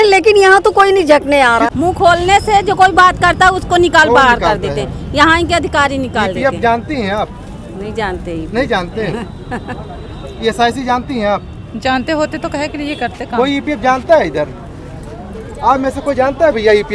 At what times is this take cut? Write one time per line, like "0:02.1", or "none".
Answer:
0:01.7